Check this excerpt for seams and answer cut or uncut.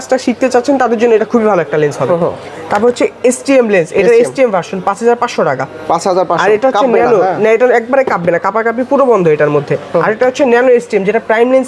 uncut